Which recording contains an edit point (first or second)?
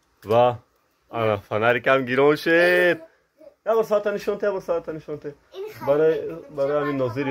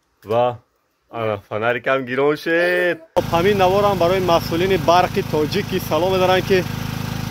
second